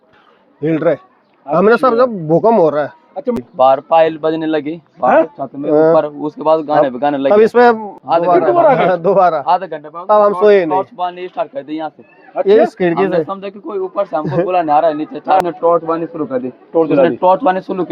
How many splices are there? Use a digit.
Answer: 3